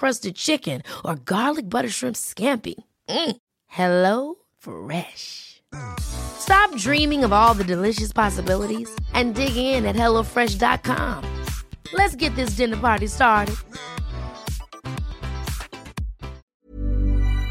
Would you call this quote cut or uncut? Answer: cut